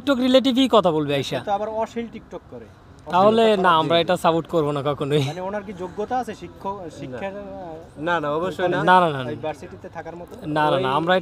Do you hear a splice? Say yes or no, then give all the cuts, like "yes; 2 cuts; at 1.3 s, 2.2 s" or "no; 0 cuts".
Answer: no; 0 cuts